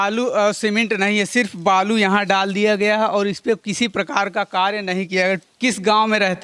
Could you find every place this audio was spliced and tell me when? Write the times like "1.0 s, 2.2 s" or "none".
5.5 s

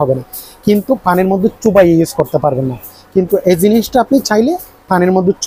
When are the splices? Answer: none

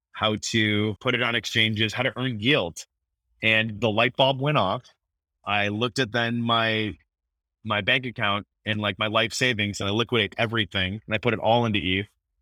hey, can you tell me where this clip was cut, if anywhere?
none

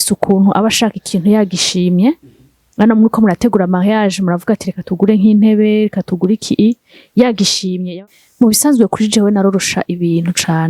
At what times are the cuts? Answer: 7.8 s

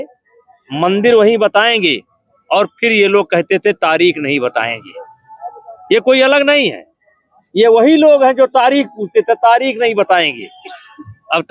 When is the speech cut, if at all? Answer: none

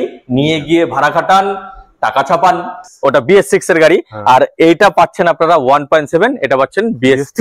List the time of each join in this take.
2.8 s

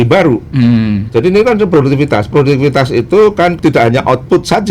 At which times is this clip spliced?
3.6 s

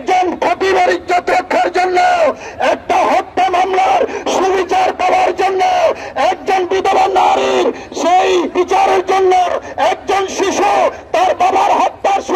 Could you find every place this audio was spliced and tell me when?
8.5 s

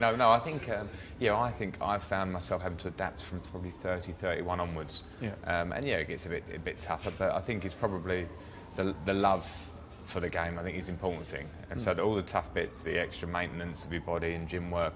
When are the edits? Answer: none

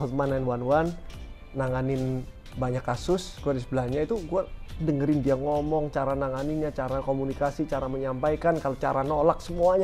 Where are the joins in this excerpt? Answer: none

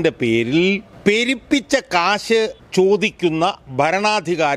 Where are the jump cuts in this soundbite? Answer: 0.9 s, 2.6 s

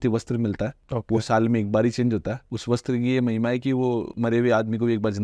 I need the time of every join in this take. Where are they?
4.1 s

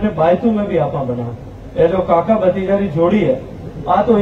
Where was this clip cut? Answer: none

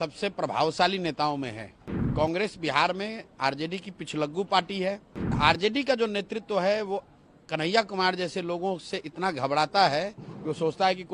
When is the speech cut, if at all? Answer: 2.1 s, 5.4 s

